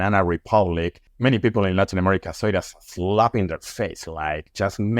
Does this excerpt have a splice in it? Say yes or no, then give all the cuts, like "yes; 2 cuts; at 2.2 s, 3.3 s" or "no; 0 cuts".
yes; 1 cut; at 1.0 s